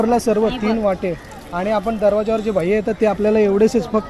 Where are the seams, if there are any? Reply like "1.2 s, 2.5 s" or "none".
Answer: none